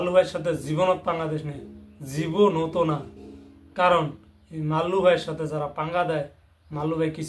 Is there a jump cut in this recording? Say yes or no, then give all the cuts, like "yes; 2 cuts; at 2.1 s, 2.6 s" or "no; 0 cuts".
no; 0 cuts